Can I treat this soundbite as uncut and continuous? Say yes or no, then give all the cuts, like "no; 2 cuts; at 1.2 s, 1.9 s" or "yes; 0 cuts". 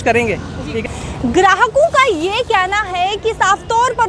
yes; 0 cuts